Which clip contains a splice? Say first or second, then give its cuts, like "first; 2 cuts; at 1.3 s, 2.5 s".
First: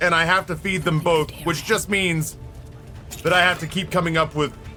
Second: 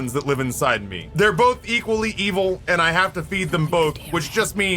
second; 1 cut; at 1.0 s